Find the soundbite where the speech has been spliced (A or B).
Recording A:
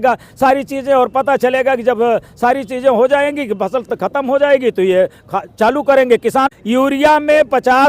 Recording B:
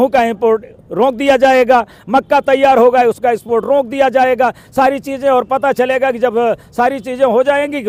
A